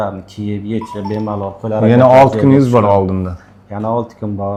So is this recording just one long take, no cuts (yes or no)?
yes